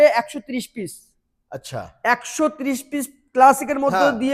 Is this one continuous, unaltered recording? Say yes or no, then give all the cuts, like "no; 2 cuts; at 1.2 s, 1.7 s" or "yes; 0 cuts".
yes; 0 cuts